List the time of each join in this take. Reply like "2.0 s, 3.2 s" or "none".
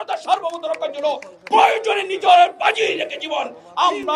none